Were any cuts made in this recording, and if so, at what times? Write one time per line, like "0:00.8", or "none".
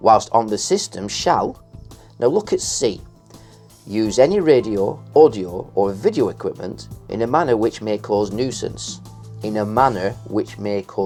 none